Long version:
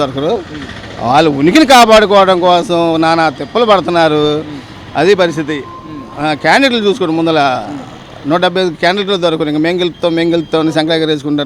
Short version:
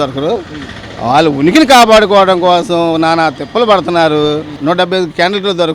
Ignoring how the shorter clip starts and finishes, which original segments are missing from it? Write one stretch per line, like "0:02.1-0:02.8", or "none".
0:04.5-0:08.1